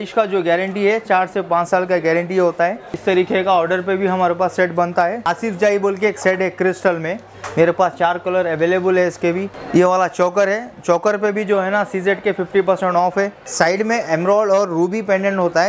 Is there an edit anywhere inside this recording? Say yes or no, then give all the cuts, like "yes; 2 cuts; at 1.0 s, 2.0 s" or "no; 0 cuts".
yes; 5 cuts; at 2.9 s, 5.3 s, 7.3 s, 9.5 s, 13.4 s